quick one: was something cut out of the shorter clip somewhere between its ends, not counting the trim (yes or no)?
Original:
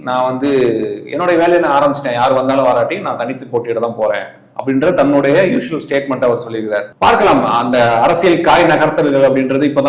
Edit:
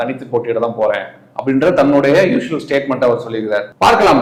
no